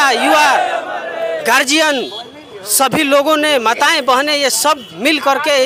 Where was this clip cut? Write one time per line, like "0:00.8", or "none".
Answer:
none